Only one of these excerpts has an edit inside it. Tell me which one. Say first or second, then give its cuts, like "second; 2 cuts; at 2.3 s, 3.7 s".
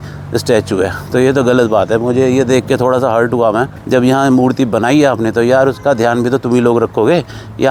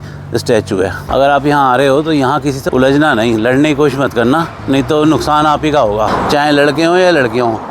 second; 3 cuts; at 1.0 s, 2.6 s, 6.1 s